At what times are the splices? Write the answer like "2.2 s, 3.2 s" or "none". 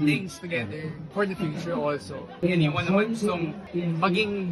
0.9 s, 2.4 s, 3.6 s